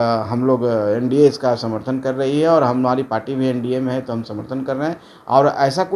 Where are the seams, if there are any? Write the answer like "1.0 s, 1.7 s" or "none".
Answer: none